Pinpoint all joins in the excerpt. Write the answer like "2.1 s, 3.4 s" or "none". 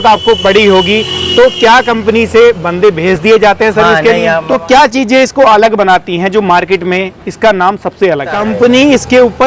4.4 s, 8.4 s